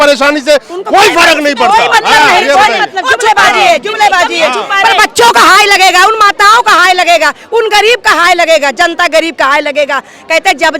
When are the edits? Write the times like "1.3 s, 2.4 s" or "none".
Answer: none